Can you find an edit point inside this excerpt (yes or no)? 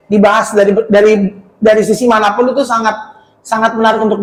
no